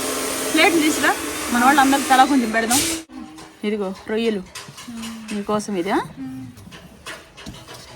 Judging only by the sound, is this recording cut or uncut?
cut